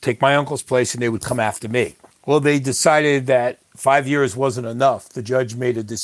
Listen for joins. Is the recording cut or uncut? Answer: cut